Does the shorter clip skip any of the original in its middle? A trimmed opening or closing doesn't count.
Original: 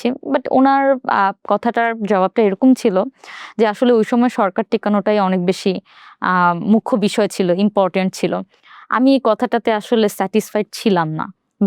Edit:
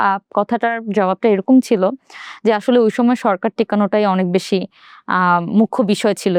no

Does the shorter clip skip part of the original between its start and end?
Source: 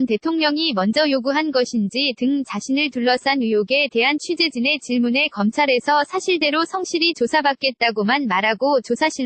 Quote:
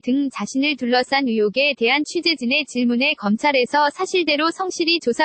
no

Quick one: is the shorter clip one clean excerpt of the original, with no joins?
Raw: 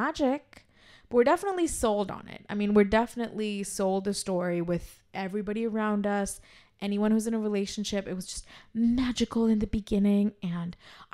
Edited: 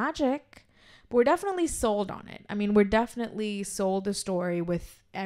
yes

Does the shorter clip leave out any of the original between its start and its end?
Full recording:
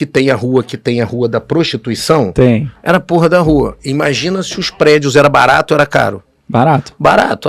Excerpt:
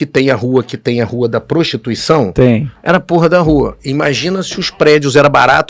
no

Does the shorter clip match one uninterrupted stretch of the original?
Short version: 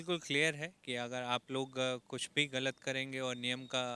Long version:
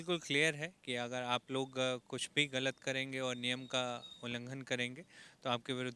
yes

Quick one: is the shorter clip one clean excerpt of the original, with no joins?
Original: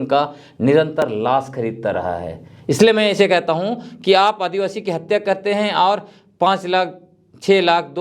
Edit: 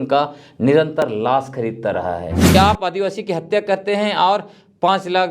no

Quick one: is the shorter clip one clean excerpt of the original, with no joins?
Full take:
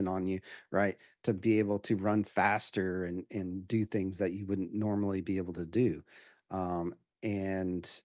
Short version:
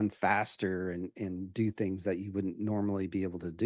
yes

